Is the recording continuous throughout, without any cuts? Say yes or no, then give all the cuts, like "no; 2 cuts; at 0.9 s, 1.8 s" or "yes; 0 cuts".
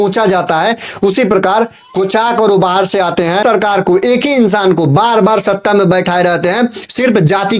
no; 1 cut; at 3.4 s